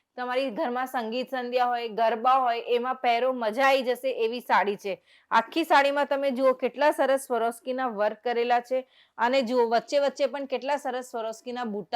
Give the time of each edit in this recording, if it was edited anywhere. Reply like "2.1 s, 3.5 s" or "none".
none